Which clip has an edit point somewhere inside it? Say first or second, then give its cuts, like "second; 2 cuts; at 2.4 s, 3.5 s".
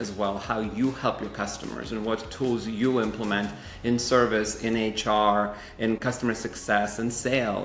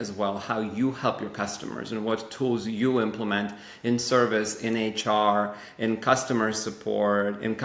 first; 1 cut; at 6.0 s